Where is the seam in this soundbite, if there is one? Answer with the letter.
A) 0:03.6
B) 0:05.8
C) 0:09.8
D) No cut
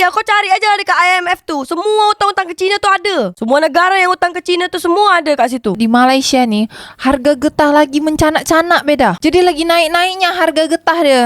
B